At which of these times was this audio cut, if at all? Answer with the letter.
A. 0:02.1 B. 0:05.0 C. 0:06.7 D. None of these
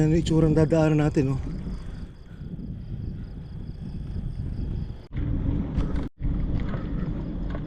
B